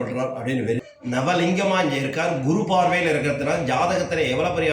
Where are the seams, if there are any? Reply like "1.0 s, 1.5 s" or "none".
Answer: 0.9 s